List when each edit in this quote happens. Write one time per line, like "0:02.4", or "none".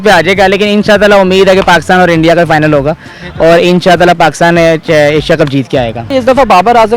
0:06.1

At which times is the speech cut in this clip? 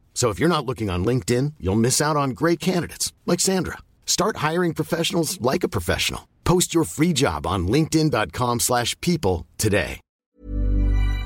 0:10.2

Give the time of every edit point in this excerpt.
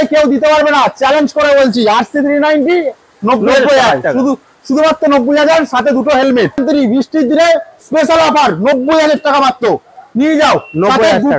0:06.6

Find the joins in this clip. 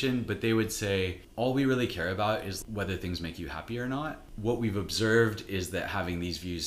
0:01.2
0:02.6
0:04.2

